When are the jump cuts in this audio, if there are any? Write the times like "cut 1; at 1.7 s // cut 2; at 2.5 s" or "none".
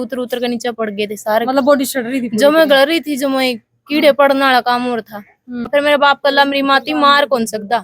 cut 1; at 5.7 s